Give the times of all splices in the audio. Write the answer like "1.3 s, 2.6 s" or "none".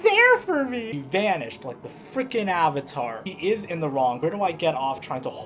0.8 s, 3.2 s, 4.2 s